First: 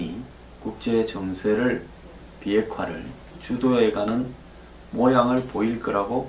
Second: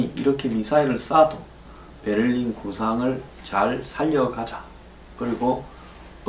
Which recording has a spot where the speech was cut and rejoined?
first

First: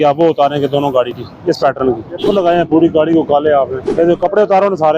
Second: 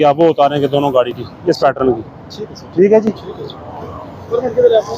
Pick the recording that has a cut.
first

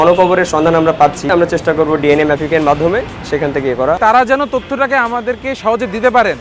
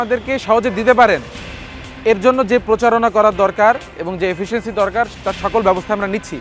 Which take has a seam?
first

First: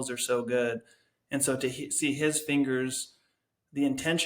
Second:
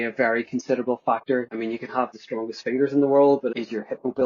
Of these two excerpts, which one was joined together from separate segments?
second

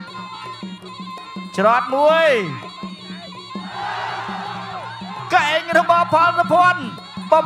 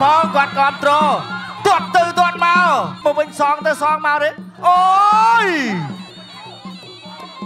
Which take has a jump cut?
second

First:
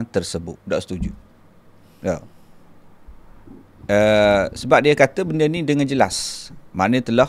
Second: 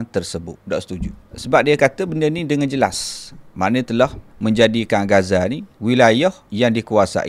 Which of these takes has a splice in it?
second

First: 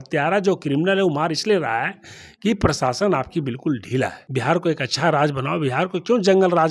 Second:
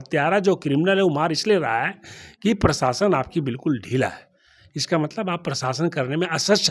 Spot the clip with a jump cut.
first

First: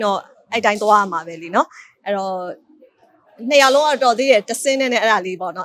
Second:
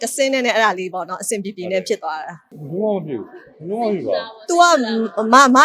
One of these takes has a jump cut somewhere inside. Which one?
second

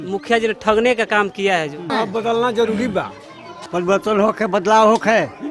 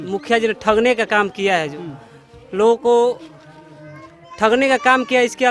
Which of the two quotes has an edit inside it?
first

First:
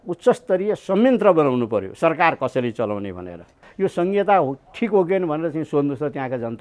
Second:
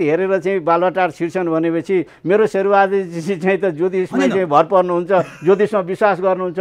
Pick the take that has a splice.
first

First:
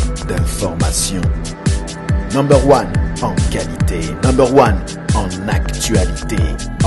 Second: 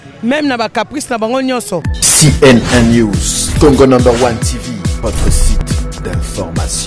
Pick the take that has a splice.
second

